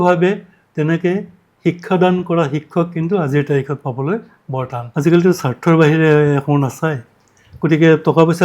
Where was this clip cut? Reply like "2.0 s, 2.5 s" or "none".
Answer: 4.8 s